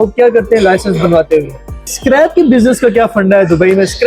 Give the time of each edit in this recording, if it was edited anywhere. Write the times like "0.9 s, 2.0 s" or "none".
1.9 s